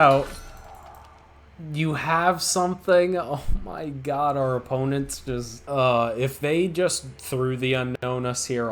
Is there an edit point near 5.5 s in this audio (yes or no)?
yes